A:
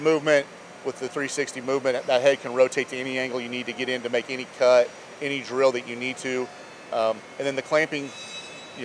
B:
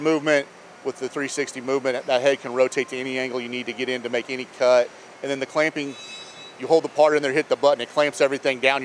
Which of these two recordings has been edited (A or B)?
B